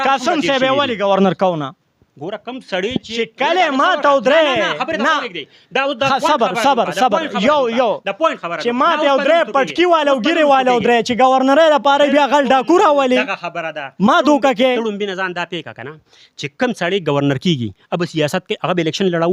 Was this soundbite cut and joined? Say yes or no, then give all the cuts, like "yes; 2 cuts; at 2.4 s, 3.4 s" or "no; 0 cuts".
no; 0 cuts